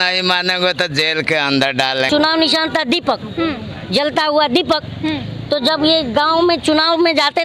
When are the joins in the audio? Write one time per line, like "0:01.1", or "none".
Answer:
0:02.1